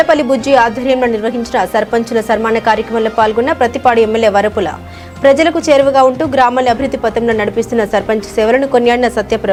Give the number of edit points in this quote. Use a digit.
0